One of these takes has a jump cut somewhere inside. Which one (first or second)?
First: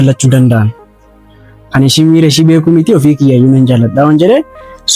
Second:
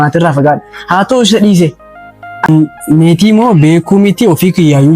second